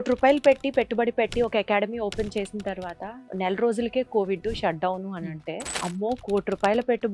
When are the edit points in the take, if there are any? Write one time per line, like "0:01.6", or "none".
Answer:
0:03.1
0:05.7